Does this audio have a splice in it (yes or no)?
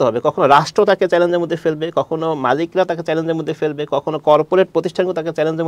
no